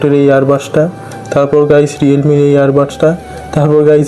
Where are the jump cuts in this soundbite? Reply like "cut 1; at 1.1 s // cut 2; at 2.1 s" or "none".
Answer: none